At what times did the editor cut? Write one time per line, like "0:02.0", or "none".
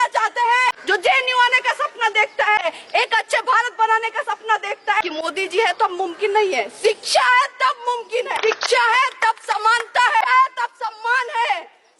0:00.7
0:02.6
0:05.0
0:08.4
0:10.2